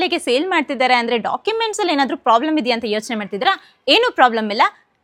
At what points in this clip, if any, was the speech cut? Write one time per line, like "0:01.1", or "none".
none